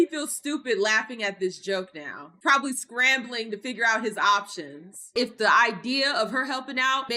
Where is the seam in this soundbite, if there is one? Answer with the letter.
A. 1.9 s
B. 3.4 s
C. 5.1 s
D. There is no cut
C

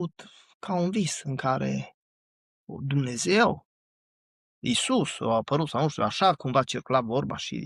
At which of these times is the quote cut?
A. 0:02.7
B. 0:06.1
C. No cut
C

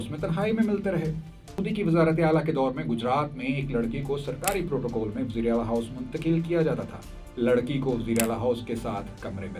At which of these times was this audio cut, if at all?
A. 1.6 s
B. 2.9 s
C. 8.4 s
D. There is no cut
A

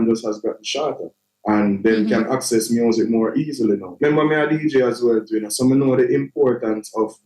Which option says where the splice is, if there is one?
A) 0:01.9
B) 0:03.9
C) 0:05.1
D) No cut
B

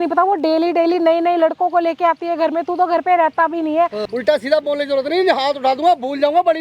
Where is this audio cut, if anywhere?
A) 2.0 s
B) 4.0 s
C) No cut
B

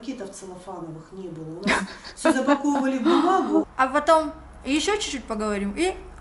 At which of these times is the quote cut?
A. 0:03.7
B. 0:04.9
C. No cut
A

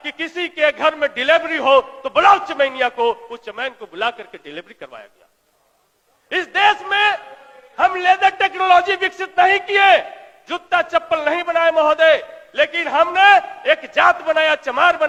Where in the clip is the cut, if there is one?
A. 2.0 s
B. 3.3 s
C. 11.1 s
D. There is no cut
D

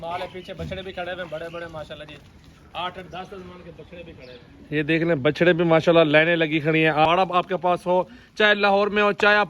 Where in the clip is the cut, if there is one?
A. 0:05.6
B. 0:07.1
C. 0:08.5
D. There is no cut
B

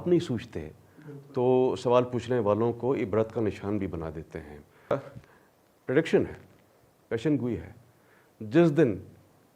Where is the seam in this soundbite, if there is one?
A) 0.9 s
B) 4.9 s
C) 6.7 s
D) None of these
B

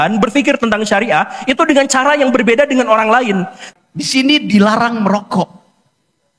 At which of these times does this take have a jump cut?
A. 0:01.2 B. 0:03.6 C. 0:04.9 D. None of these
B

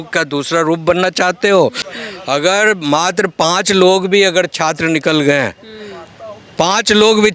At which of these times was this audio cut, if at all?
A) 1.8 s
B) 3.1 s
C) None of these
A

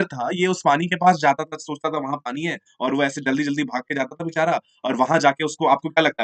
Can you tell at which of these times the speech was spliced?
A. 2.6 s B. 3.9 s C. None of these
C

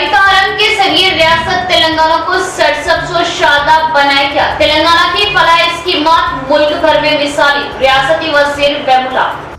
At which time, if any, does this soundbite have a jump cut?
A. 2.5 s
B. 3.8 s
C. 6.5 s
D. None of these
D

